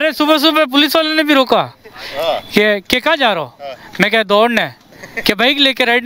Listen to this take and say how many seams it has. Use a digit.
0